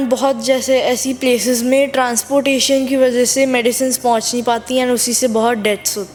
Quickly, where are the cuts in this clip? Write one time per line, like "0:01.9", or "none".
none

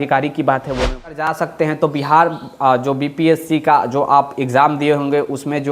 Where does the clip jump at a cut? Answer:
0:01.1

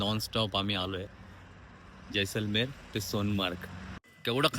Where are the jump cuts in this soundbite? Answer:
none

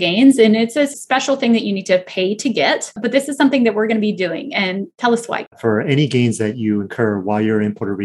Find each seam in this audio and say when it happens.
0:01.0
0:03.0
0:05.6

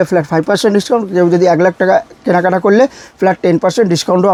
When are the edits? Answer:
none

